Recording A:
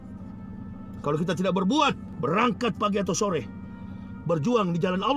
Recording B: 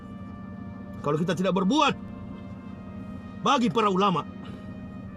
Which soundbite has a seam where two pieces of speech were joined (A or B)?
A